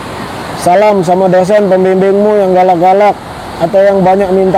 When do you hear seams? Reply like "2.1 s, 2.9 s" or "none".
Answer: none